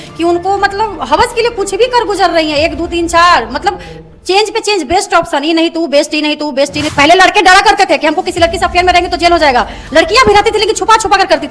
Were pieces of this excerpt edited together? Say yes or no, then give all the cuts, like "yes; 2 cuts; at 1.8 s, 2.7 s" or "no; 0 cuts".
yes; 1 cut; at 6.9 s